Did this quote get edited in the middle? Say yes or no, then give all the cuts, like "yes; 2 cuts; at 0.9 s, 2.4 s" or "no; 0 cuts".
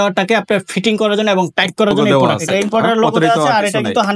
yes; 1 cut; at 2.4 s